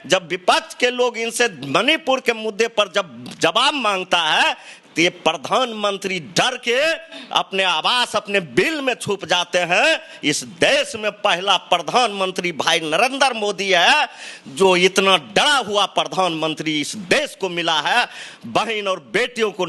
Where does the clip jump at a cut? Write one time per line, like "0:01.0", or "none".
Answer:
none